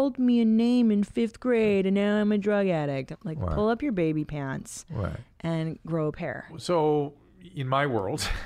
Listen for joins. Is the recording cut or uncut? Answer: cut